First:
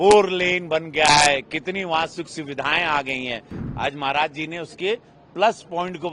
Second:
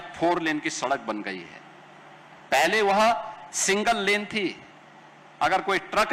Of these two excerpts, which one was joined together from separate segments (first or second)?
first